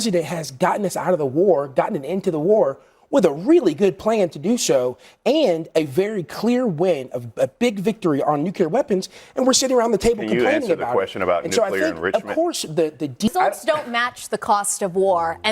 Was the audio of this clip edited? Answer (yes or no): yes